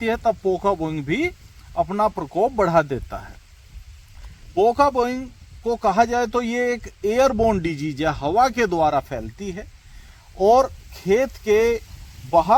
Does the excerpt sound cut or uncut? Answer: uncut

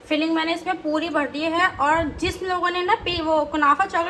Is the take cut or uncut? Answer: uncut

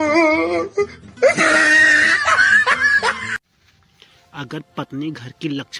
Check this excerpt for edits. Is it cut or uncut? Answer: cut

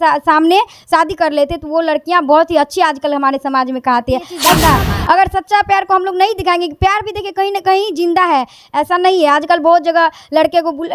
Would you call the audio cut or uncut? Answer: cut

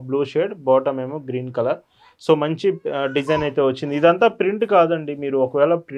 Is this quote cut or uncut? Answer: uncut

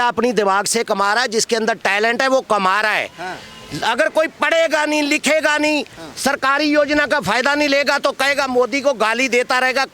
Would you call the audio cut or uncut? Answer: uncut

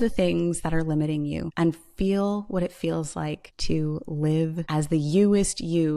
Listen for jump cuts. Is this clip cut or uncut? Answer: cut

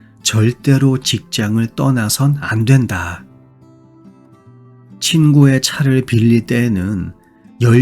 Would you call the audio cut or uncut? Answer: cut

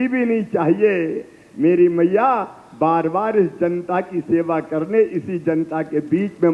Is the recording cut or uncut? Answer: uncut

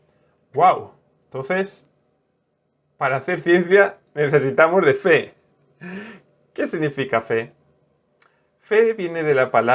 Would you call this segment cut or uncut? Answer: uncut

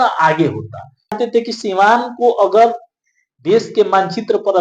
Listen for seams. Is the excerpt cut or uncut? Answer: cut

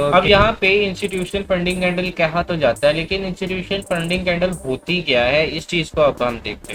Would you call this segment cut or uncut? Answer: uncut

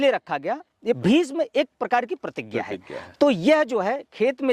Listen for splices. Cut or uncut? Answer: cut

